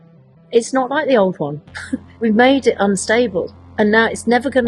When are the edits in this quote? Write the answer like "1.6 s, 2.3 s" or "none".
2.1 s